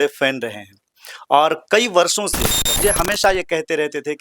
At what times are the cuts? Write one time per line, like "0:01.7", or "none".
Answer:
0:02.8